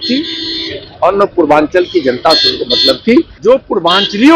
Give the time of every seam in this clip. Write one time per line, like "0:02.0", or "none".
0:03.3